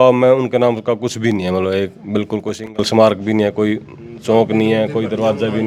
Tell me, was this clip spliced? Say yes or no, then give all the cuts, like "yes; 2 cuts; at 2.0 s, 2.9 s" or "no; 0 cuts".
no; 0 cuts